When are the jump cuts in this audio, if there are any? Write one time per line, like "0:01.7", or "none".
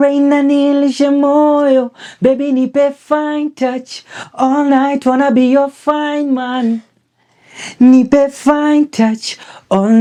none